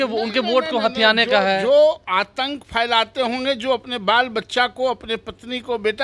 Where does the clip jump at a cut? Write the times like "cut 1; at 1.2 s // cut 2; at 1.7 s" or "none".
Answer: none